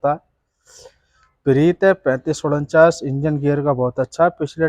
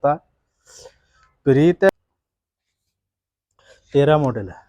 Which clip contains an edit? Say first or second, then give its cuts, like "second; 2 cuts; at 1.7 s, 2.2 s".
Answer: second; 1 cut; at 1.9 s